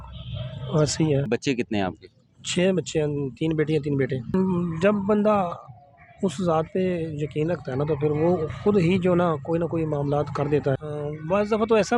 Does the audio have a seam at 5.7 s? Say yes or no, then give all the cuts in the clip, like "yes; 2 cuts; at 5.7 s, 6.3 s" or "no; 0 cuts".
no; 3 cuts; at 1.3 s, 4.3 s, 10.9 s